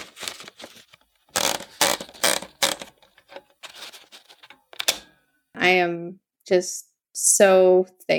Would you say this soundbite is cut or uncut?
cut